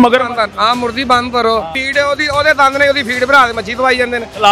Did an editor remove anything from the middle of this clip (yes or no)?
yes